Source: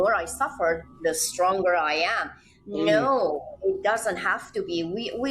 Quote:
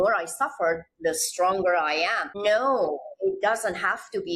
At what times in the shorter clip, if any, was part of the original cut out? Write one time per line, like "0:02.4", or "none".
0:02.3